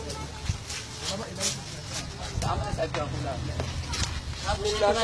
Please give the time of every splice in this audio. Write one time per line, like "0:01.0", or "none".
0:02.8